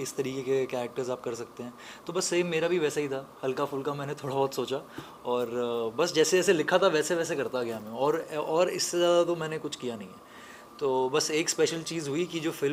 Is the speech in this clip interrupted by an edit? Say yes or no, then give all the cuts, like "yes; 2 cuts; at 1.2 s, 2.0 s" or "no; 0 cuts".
no; 0 cuts